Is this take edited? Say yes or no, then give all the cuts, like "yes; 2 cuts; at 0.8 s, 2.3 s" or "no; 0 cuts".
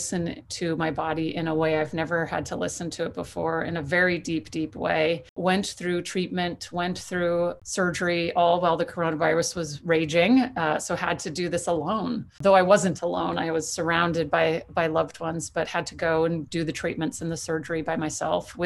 yes; 3 cuts; at 5.4 s, 7.6 s, 12.4 s